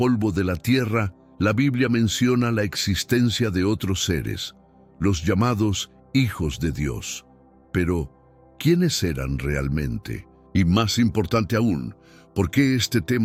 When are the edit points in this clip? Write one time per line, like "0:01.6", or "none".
none